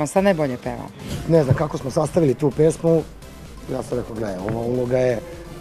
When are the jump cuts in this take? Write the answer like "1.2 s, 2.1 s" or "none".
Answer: 1.1 s

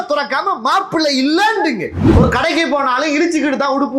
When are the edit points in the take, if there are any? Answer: 1.9 s

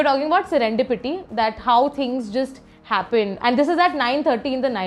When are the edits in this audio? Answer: 3.3 s

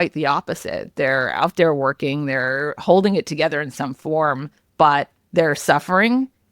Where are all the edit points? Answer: 5.2 s

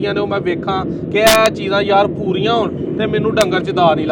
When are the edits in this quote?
none

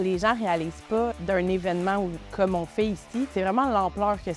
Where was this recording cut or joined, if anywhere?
1.1 s, 2.2 s, 3.3 s

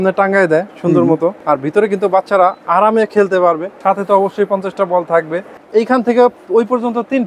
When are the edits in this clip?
1.4 s, 3.7 s, 5.5 s

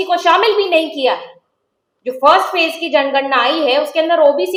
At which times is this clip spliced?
none

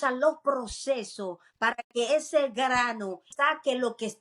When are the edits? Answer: 3.3 s

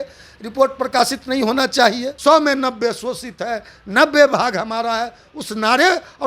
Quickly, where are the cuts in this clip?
2.1 s

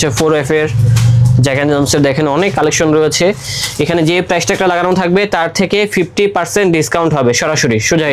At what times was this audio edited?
none

